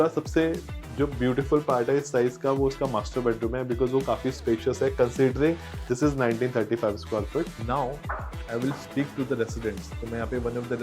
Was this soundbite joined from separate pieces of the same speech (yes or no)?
yes